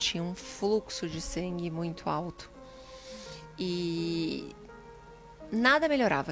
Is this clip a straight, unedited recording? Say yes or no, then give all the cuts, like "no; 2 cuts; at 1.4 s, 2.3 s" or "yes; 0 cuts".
yes; 0 cuts